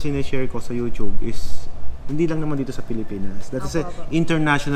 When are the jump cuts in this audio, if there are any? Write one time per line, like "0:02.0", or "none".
none

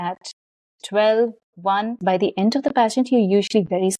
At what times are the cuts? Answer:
0:02.0

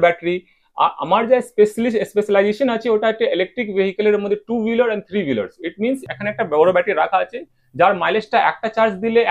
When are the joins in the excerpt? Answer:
0:06.0

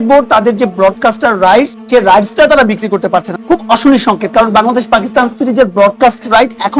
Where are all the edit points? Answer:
0:01.8
0:03.3

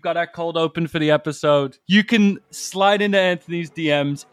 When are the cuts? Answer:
0:01.8

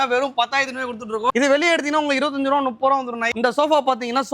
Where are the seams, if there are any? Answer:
0:01.3
0:03.3

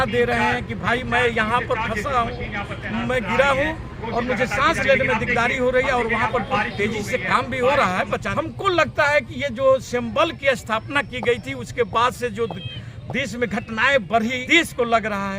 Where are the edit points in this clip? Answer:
0:08.3
0:14.4

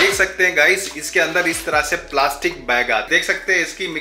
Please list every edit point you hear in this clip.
0:03.1

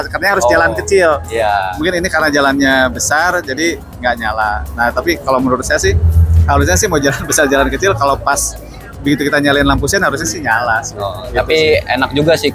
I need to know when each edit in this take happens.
none

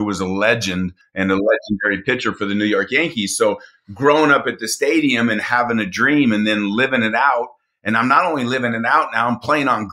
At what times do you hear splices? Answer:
0:01.0

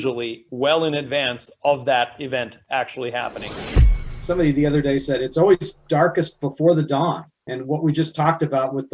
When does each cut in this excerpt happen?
0:03.8

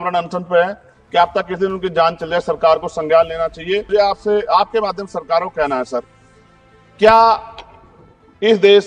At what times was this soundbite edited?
0:03.9

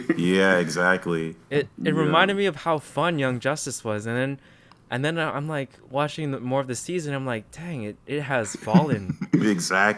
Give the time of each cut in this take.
0:08.7

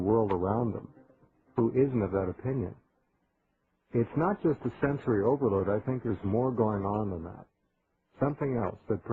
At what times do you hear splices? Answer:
0:05.5

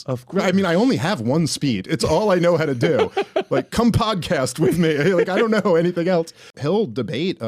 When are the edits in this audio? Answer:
0:06.6

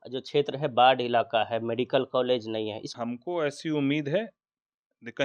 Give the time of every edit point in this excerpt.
0:02.8

